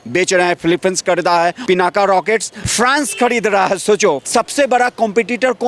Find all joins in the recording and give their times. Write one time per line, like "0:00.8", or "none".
0:01.6
0:02.6
0:04.2